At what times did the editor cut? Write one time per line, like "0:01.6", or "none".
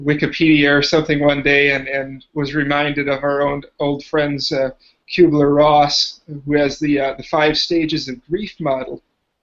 0:04.8